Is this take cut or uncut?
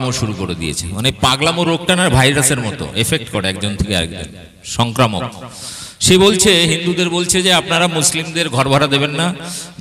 uncut